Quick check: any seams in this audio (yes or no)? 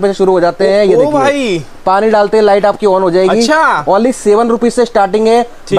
no